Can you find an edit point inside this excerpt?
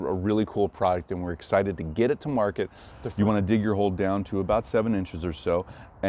yes; 1 cut; at 3.0 s

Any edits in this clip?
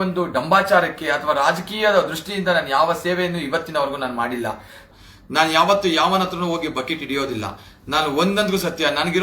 yes; 1 cut; at 4.8 s

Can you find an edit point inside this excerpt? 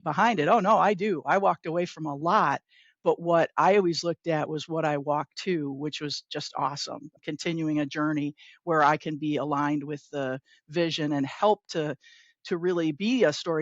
yes; 1 cut; at 7.2 s

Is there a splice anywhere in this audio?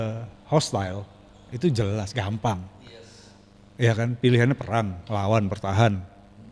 no; 0 cuts

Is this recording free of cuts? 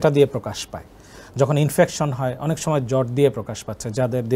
yes; 0 cuts

